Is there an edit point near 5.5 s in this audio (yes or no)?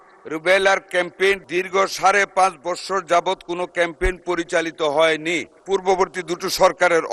yes